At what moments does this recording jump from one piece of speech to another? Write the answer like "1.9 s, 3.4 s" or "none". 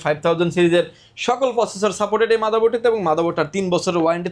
none